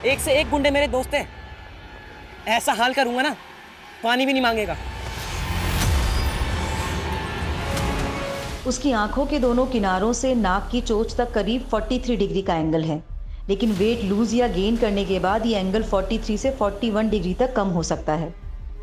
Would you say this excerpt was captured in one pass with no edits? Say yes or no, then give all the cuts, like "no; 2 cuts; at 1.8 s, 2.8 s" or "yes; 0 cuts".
no; 1 cut; at 7.8 s